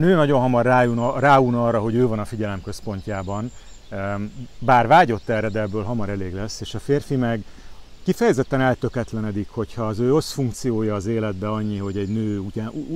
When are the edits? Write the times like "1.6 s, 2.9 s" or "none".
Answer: none